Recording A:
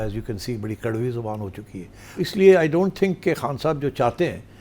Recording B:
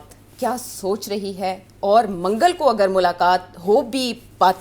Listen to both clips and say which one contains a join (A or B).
A